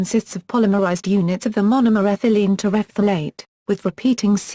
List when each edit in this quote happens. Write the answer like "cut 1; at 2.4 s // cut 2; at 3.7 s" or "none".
cut 1; at 2.5 s